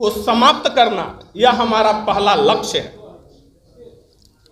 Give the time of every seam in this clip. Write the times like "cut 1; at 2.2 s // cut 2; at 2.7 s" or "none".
none